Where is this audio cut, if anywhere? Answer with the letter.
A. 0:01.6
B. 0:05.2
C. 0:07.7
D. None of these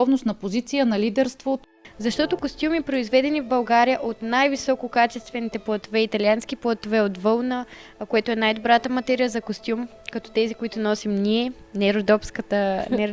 A